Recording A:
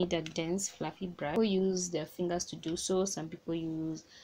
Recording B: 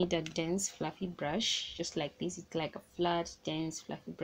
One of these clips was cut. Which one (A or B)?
A